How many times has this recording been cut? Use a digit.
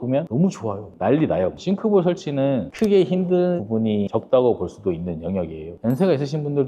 2